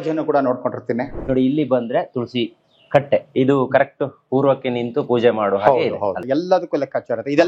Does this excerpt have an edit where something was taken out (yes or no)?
yes